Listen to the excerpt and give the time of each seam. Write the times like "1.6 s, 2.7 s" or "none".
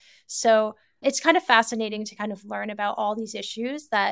none